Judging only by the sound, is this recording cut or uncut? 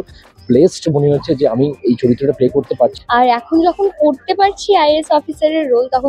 cut